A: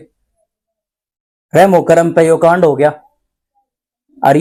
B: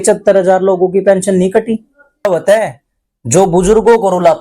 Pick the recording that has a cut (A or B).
B